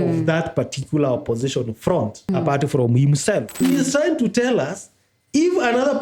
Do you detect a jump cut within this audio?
yes; 2 cuts; at 2.3 s, 3.6 s

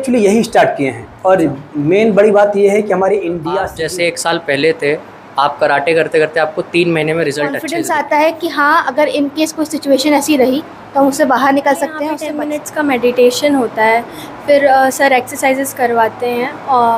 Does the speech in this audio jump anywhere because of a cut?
yes; 3 cuts; at 3.7 s, 7.6 s, 12.2 s

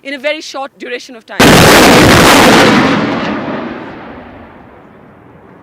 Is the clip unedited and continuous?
yes; 0 cuts

